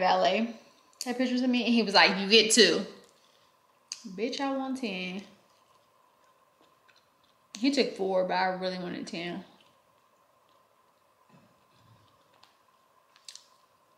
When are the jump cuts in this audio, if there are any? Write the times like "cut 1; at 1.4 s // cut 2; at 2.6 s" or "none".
cut 1; at 13.1 s